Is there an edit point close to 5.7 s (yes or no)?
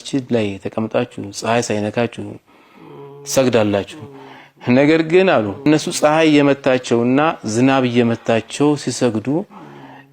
yes